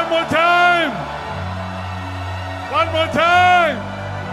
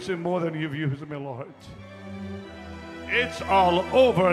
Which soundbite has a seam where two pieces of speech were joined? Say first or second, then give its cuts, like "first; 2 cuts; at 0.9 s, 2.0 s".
second; 1 cut; at 1.9 s